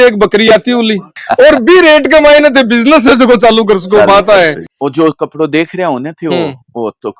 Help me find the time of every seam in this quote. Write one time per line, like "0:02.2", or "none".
0:01.2
0:04.7